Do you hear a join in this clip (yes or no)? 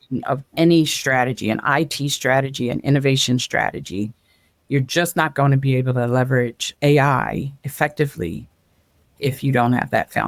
no